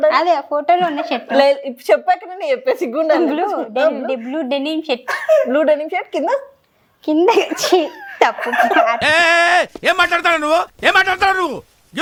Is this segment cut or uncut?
uncut